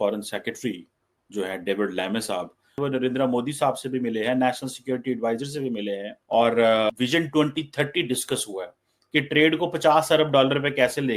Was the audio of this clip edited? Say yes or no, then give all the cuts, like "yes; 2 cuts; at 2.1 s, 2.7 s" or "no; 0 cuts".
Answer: yes; 3 cuts; at 2.7 s, 6.1 s, 6.9 s